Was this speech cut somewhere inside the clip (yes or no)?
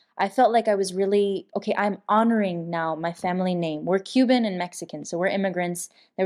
yes